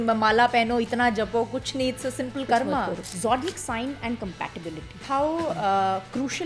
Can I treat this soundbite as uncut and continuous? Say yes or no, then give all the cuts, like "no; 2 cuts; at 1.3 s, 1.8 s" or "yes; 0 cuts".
no; 2 cuts; at 3.1 s, 5.0 s